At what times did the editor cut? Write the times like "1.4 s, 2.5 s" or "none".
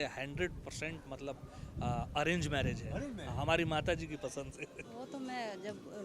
4.8 s